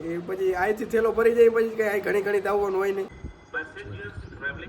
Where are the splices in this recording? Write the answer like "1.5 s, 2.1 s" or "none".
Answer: 3.1 s